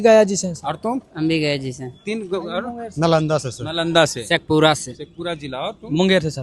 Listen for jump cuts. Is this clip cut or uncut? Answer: uncut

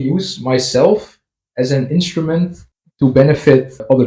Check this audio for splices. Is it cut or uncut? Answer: uncut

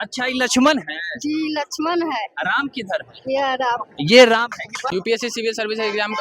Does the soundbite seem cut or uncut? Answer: cut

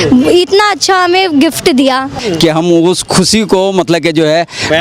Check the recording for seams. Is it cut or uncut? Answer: cut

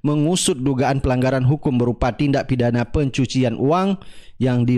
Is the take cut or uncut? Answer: uncut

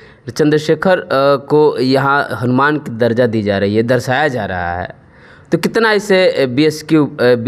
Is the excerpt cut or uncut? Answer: uncut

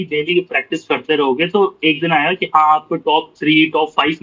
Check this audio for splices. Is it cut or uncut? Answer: uncut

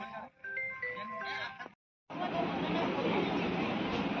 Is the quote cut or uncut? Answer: cut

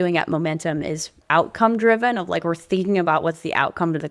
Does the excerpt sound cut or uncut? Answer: cut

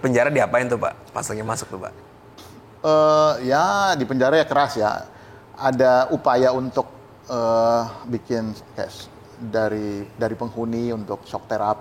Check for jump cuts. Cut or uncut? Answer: uncut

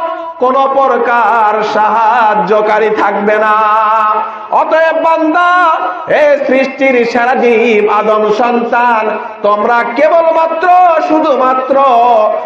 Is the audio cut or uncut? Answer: uncut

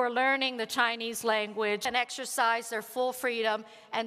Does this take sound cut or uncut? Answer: cut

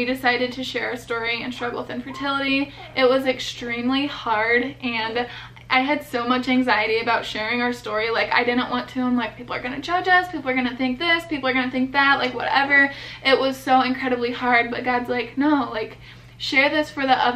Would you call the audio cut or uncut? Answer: uncut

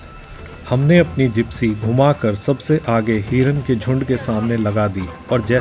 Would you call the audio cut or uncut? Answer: uncut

